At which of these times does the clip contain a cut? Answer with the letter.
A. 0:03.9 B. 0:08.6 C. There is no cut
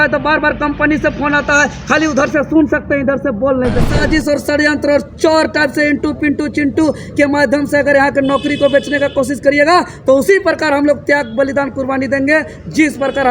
A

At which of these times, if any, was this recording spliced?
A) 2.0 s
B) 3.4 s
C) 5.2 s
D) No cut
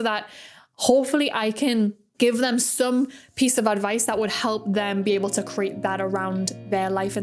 A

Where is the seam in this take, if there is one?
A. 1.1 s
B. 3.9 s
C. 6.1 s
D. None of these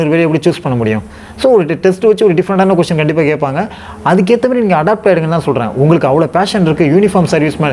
D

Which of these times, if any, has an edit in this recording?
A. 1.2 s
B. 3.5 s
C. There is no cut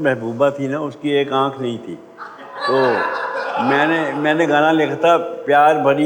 C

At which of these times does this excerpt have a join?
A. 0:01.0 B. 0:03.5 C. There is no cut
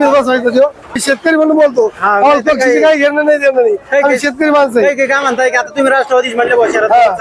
A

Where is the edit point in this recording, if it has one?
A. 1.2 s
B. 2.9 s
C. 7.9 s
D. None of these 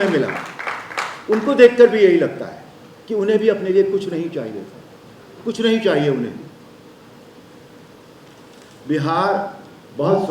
C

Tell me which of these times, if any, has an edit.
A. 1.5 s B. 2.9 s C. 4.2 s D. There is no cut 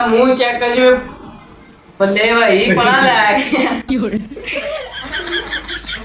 D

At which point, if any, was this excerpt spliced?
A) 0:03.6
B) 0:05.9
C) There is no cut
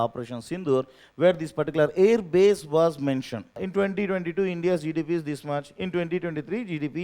A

